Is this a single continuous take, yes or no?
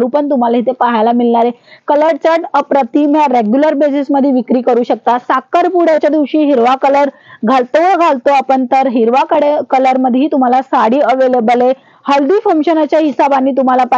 yes